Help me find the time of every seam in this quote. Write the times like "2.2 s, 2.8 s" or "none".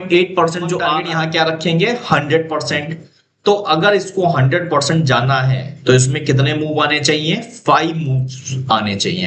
1.0 s